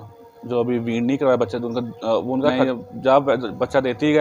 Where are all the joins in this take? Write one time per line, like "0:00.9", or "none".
0:02.6